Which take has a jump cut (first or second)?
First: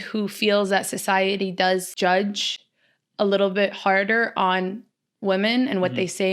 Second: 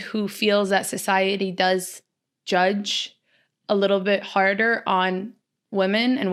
first